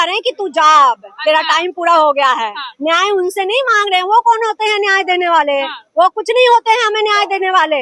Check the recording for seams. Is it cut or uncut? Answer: uncut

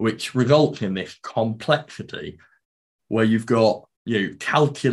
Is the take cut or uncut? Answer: cut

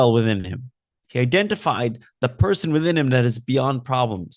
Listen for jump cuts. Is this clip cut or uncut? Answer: uncut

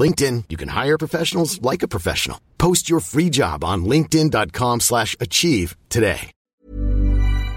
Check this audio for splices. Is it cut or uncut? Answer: cut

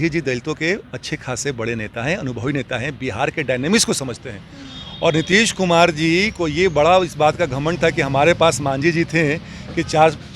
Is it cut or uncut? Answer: uncut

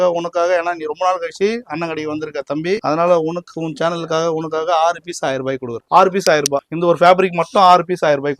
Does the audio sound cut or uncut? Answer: cut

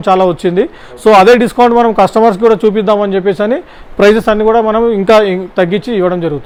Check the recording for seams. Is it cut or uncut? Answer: uncut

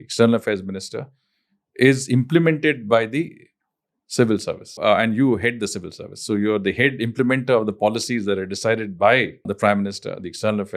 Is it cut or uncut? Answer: cut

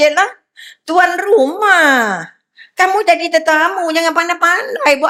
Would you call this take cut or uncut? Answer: uncut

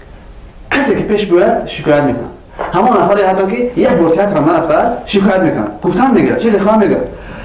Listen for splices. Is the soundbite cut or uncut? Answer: uncut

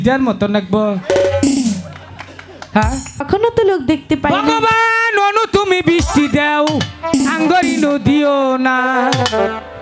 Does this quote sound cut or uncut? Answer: cut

